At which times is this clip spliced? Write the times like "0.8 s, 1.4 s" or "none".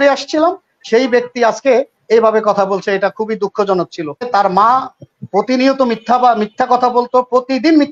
4.3 s